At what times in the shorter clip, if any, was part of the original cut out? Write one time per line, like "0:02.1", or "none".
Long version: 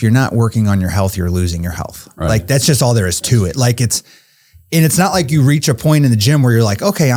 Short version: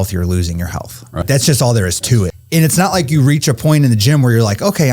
0:01.2
0:02.3